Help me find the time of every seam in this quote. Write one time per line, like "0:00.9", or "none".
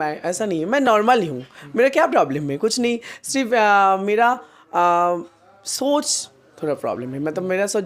none